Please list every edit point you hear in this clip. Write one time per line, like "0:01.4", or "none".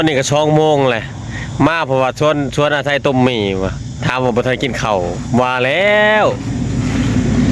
none